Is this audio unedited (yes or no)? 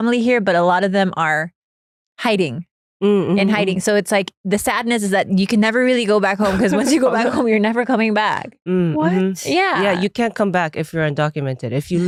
yes